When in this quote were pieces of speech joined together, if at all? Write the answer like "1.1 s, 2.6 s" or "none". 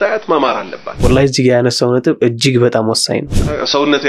1.0 s, 3.3 s